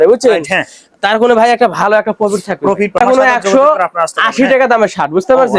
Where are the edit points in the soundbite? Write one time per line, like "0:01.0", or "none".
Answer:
0:03.0